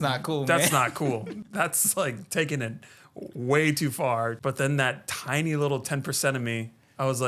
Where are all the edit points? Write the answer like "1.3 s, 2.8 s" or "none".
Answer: 1.3 s, 4.4 s